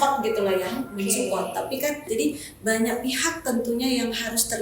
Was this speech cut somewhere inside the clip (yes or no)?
yes